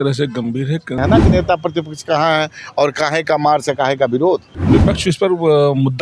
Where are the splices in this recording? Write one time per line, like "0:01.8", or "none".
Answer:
0:01.0
0:04.5